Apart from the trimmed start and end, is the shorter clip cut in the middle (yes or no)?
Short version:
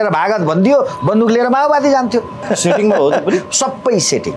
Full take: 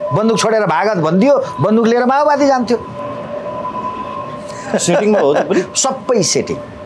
yes